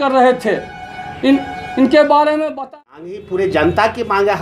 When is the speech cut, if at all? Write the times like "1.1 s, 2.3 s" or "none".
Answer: 2.6 s